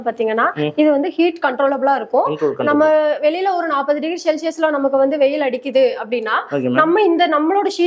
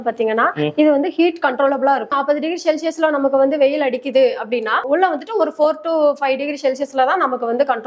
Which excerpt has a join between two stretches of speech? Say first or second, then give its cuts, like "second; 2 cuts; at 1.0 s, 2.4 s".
second; 2 cuts; at 2.1 s, 4.8 s